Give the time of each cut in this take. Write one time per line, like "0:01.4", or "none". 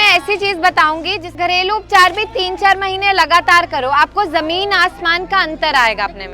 0:01.3